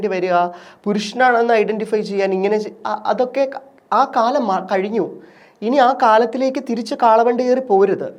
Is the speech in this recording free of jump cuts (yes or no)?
yes